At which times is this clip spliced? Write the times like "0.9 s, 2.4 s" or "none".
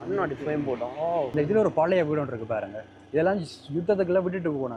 1.3 s